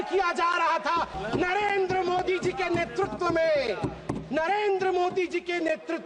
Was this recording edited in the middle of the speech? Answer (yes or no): yes